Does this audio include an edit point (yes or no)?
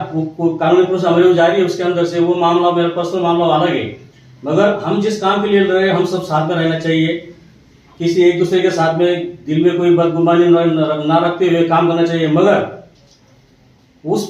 no